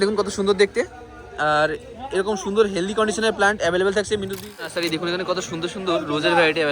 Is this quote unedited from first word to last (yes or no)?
no